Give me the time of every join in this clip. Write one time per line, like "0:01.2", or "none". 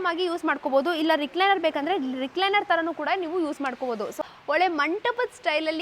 0:04.2